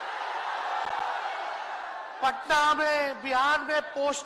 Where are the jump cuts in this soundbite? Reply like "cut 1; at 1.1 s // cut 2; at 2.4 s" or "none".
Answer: none